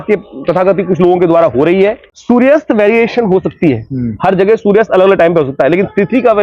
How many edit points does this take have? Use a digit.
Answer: 1